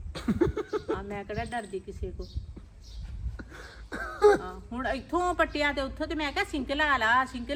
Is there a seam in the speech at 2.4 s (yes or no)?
no